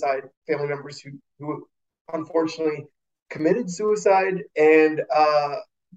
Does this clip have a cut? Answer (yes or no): no